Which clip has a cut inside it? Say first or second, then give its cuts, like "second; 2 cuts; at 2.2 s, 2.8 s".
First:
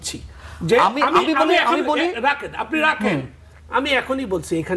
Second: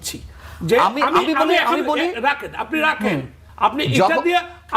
second; 1 cut; at 3.4 s